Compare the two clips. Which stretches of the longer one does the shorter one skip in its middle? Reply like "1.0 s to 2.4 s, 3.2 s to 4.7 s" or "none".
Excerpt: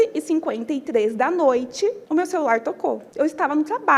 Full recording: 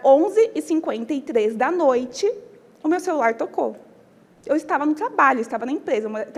2.4 s to 2.7 s, 3.8 s to 4.4 s